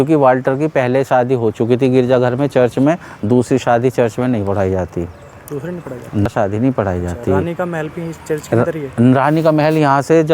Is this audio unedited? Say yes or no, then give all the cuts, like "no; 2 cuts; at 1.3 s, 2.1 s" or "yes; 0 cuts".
no; 1 cut; at 6.3 s